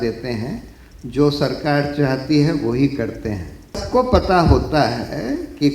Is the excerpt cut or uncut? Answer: cut